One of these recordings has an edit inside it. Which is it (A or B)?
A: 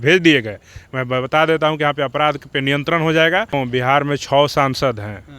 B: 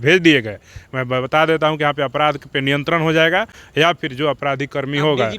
A